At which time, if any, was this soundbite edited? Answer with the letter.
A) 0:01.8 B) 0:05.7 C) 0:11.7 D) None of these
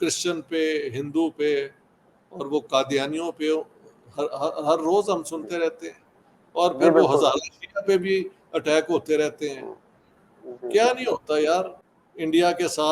C